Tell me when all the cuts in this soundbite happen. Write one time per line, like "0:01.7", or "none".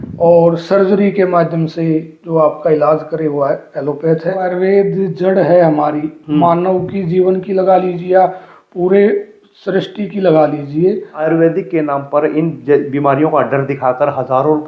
0:04.5
0:11.1